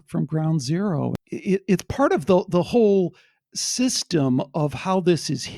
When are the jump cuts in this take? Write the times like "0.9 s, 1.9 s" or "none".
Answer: 1.1 s